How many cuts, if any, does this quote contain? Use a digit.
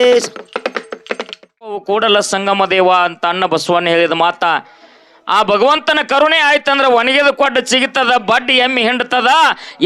1